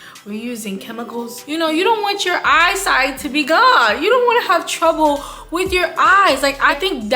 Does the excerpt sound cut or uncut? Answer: cut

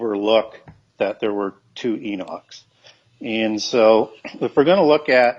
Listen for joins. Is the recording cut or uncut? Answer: uncut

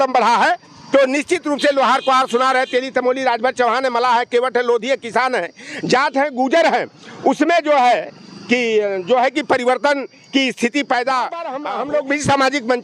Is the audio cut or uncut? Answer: cut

